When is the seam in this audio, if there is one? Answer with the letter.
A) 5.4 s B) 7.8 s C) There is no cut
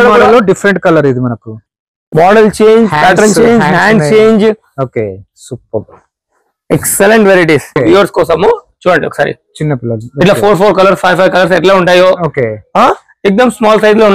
B